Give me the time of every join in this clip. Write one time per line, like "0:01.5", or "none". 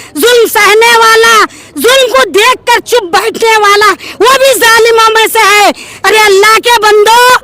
0:05.9